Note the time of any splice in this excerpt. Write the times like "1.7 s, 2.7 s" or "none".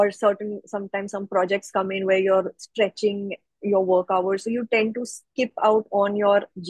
none

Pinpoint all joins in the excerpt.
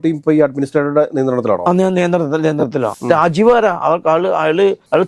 2.9 s

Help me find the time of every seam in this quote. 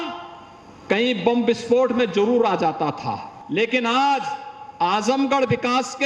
3.3 s

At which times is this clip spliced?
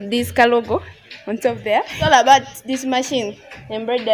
none

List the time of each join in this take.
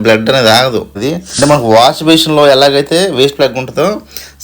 1.0 s

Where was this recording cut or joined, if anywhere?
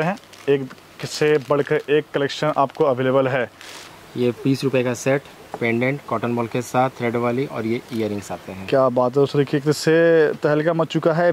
3.8 s

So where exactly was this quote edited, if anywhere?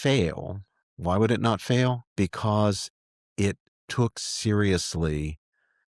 2.1 s

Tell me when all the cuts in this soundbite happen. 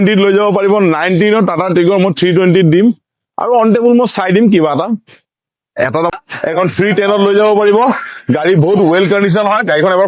6.1 s

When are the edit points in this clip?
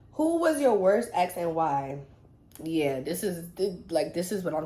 none

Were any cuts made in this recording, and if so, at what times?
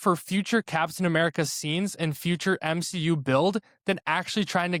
none

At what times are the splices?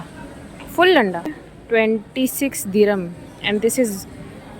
1.5 s

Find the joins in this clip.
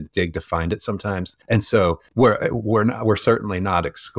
1.3 s, 2.0 s

